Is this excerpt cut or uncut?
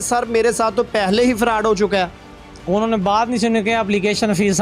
uncut